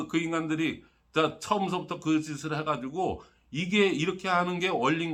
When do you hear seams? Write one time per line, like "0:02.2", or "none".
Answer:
none

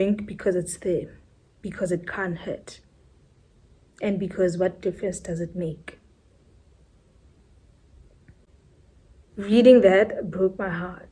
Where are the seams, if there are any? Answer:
0:08.5

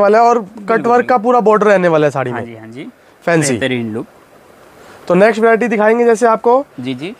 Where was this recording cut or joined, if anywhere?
none

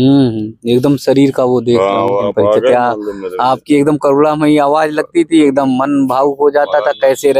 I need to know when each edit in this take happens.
0:02.2

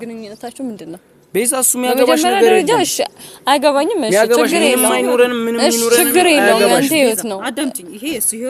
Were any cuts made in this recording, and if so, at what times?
none

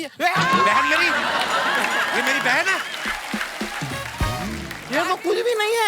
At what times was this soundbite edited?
0:04.7

